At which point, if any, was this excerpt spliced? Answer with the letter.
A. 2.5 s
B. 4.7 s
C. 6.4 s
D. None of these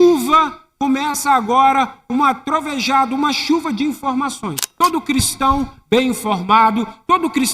B